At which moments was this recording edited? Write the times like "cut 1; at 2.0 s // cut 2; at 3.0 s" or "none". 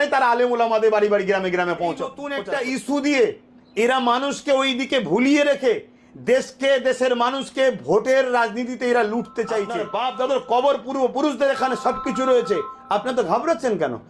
cut 1; at 2.3 s // cut 2; at 9.8 s